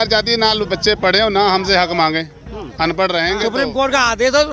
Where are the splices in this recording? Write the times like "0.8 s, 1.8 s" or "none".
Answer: 3.4 s